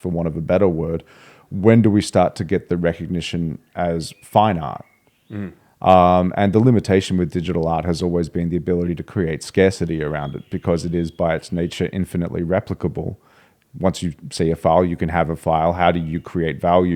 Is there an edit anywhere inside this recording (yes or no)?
no